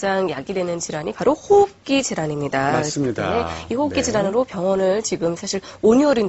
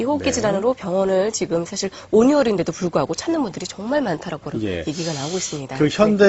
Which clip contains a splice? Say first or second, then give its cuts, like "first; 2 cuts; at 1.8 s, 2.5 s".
first; 1 cut; at 1.1 s